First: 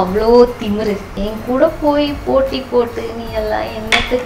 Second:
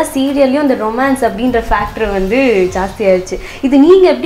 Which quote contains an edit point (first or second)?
first